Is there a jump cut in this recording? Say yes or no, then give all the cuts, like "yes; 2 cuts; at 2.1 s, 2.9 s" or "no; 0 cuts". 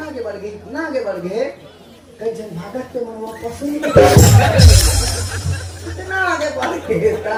no; 0 cuts